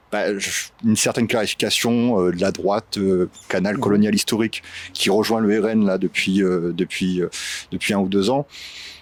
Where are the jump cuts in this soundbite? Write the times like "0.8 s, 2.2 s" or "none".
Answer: none

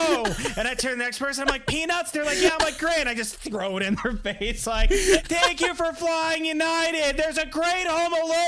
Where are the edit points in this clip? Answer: none

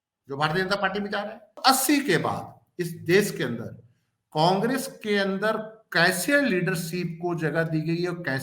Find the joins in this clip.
1.5 s

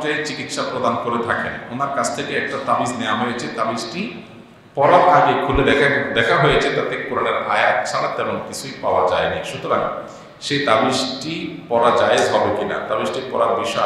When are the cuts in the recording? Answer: none

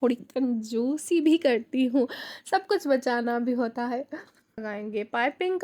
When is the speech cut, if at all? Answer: 4.6 s

